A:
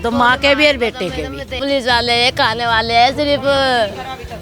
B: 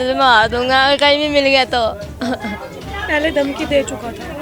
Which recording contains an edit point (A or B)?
A